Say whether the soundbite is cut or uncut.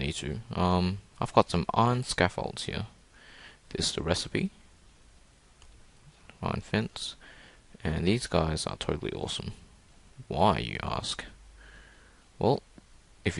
cut